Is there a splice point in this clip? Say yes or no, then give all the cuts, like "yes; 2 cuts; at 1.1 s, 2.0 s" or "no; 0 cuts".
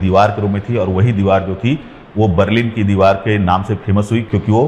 no; 0 cuts